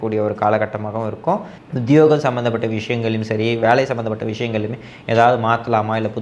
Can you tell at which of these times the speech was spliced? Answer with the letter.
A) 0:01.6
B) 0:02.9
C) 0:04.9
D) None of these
A